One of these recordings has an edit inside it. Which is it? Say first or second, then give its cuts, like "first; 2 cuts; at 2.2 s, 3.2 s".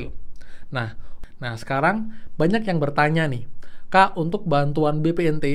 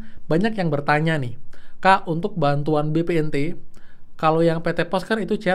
first; 1 cut; at 1.1 s